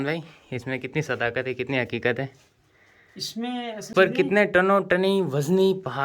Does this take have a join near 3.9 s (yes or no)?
yes